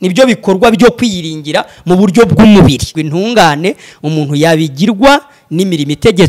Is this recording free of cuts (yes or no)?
no